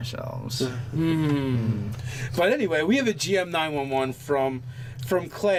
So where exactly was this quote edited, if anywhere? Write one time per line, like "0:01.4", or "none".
none